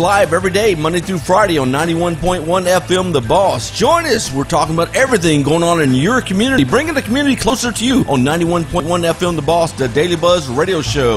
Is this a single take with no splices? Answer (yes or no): yes